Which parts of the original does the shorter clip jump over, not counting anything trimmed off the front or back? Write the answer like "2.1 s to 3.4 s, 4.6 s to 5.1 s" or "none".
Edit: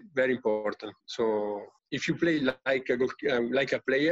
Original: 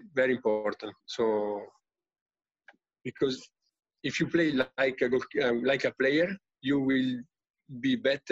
1.8 s to 3.9 s

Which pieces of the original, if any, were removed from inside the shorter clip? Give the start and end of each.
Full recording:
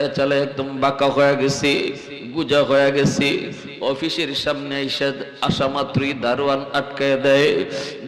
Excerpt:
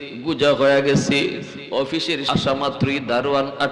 4.3 s to 5.4 s

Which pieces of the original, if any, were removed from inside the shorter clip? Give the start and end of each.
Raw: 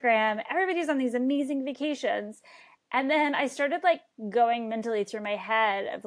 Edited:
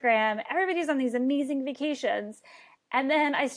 none

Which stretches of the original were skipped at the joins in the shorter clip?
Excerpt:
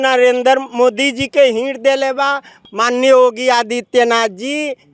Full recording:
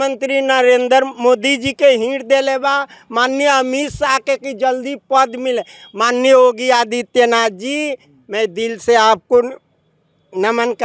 3.0 s to 5.8 s

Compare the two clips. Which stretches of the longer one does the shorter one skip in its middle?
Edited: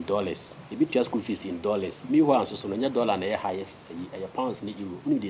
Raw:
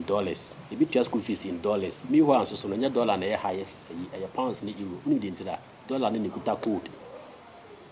none

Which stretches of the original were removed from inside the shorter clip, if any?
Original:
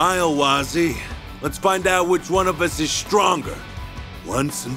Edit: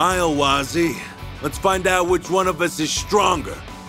none

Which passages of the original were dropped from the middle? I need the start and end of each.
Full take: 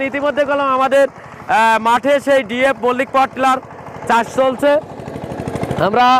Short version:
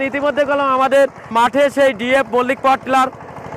1.3 s to 1.8 s

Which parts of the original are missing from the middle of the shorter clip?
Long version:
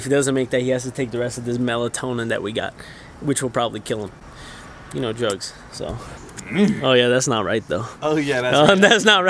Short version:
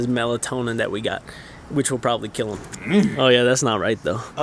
4.2 s to 6.3 s

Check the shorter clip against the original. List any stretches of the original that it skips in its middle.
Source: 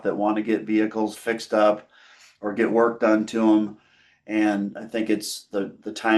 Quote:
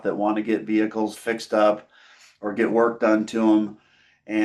none

